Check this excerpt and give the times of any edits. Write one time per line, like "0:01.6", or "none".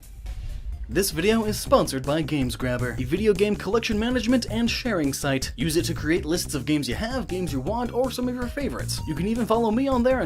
0:03.6